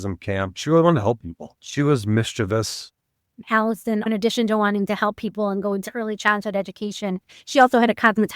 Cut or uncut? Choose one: cut